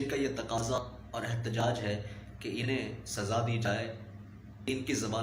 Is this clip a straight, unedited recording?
yes; 0 cuts

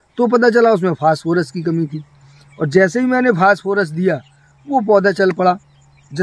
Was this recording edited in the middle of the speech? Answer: no; 0 cuts

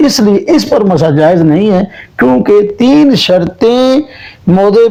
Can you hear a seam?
no; 0 cuts

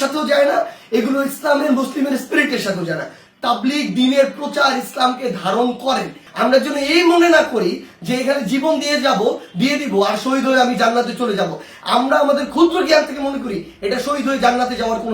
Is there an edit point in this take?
yes; 2 cuts; at 3.2 s, 6.2 s

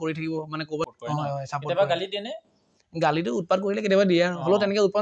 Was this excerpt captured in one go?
no; 1 cut; at 0.9 s

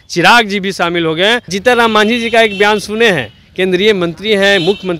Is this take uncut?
no; 1 cut; at 1.6 s

